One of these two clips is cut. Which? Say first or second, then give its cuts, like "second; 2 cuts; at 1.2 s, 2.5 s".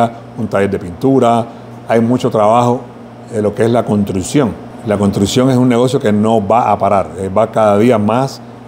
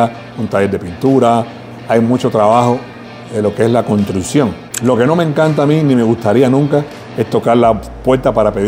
second; 1 cut; at 4.7 s